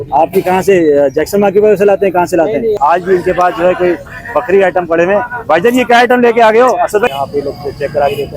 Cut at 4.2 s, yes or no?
no